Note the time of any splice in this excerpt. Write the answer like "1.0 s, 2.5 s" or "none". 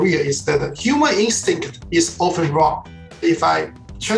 3.2 s